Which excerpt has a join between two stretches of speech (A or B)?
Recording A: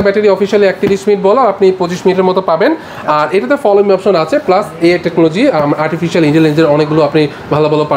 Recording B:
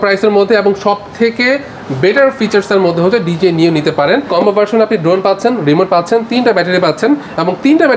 B